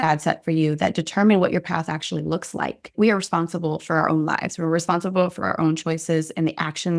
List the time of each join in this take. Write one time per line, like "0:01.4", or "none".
0:02.8